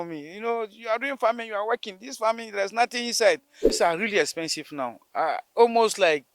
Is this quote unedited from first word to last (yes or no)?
no